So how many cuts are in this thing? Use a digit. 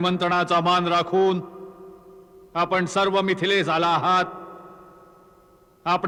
0